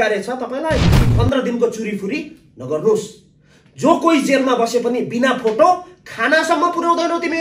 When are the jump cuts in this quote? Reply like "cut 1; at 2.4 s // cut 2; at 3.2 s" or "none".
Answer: cut 1; at 0.9 s